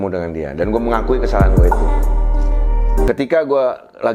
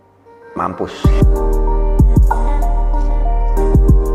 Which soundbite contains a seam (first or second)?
first